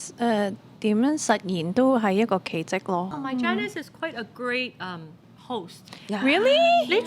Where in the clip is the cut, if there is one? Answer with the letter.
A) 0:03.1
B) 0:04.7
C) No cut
A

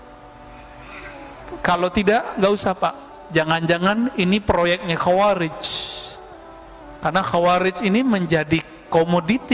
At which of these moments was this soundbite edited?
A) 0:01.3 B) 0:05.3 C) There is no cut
C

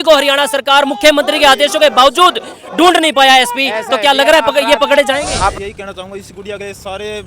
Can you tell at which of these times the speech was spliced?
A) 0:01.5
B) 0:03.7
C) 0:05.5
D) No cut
C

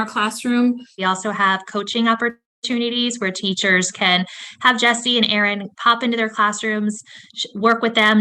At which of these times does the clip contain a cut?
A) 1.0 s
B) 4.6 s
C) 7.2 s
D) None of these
A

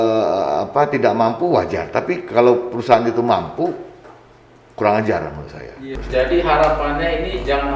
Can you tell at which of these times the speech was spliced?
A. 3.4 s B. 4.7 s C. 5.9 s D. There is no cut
C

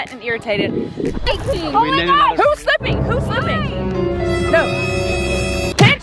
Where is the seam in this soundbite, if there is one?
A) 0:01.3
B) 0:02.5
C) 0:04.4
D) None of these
A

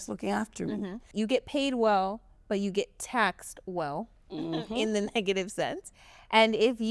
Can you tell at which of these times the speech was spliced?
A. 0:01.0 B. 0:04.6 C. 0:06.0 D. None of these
A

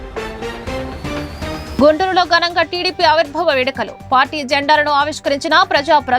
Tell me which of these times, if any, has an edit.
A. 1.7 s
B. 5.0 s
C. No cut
C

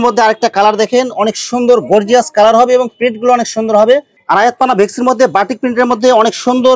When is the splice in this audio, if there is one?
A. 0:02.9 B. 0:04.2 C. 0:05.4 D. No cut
B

